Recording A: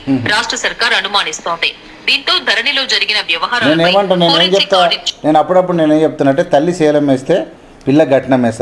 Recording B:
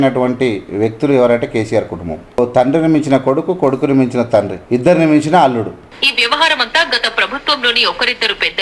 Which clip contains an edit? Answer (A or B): B